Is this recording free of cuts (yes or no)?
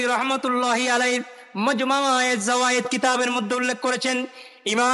yes